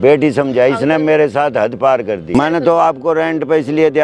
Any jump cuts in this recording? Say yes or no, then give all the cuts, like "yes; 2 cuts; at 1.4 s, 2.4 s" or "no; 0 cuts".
yes; 1 cut; at 2.3 s